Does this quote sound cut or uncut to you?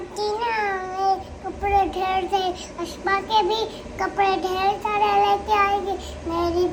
uncut